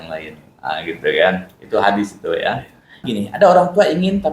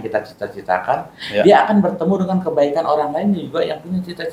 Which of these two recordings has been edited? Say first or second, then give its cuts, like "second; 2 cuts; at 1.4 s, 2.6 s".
first; 1 cut; at 3.1 s